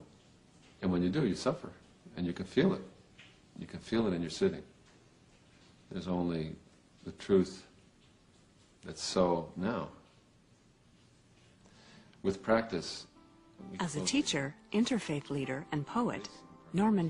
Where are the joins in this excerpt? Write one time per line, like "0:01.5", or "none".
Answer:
0:12.7